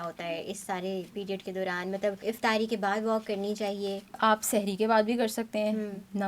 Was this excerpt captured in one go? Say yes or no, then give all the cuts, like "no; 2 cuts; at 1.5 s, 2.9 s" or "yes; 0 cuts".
no; 2 cuts; at 2.2 s, 4.2 s